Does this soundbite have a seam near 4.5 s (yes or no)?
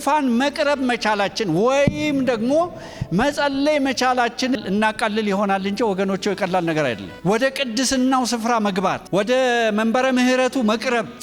yes